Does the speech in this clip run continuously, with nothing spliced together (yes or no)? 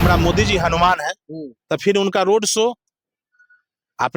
yes